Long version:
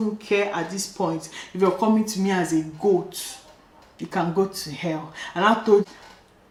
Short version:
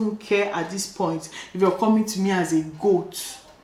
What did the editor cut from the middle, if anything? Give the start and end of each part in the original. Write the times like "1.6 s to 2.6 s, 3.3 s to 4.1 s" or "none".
none